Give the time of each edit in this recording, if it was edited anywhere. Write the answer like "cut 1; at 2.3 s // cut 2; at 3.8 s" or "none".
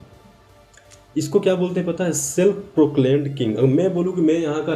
none